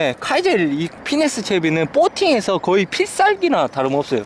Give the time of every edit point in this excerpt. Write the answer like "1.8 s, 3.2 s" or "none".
none